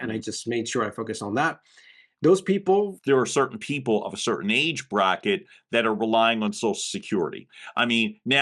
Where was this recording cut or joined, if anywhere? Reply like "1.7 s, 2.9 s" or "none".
3.0 s